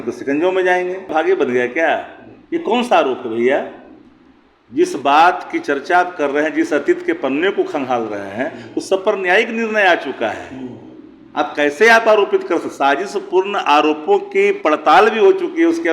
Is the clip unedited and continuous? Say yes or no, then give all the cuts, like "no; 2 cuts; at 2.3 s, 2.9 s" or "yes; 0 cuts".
no; 1 cut; at 1.1 s